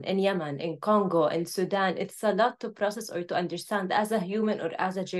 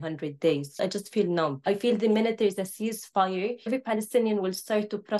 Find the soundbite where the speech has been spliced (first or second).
second